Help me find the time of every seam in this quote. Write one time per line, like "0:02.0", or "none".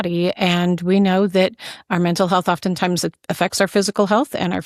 none

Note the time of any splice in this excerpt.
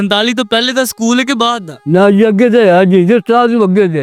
none

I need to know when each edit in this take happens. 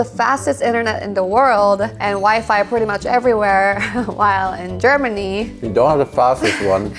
none

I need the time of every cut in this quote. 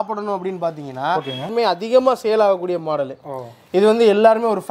0:01.5

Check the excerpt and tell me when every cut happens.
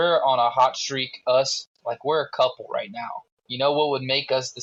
none

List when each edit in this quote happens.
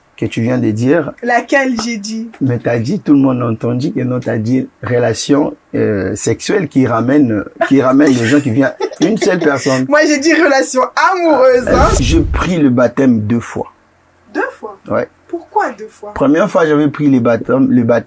0:12.0

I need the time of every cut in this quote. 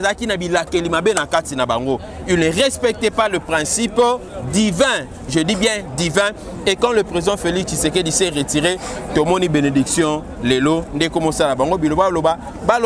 none

